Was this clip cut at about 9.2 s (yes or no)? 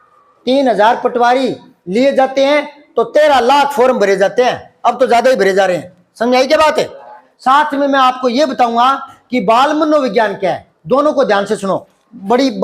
no